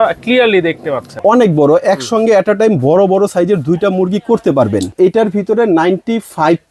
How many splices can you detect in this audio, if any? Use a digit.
2